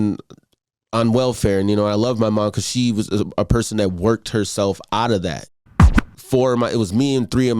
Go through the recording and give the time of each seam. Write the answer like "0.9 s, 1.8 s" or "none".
5.8 s